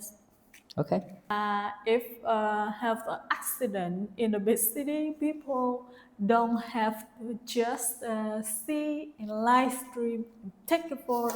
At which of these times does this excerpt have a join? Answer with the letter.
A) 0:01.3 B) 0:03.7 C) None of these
A